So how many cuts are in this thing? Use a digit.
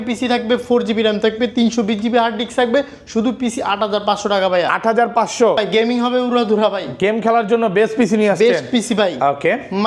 1